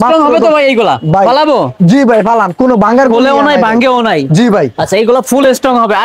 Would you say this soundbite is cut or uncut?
uncut